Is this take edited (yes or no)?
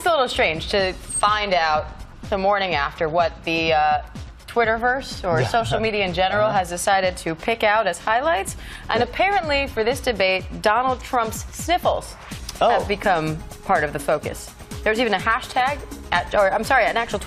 yes